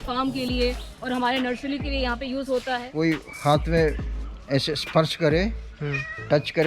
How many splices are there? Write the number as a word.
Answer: one